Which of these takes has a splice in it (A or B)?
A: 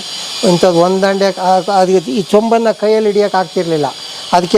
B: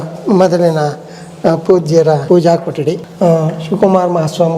B